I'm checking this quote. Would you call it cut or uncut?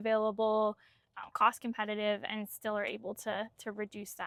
uncut